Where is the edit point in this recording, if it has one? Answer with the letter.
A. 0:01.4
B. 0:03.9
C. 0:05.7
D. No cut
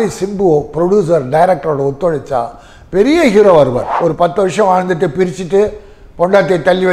B